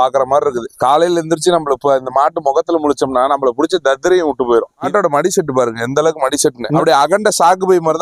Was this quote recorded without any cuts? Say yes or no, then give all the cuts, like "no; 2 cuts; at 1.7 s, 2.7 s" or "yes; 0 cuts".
no; 2 cuts; at 4.8 s, 6.7 s